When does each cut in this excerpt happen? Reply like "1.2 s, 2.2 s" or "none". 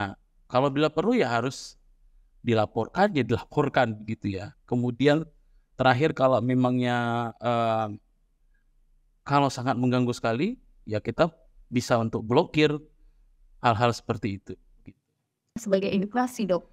15.6 s